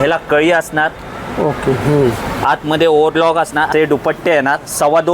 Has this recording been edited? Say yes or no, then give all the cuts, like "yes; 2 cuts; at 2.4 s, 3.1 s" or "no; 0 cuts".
yes; 1 cut; at 3.7 s